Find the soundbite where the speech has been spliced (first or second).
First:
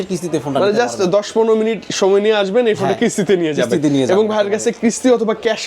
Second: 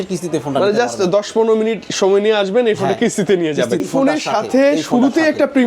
second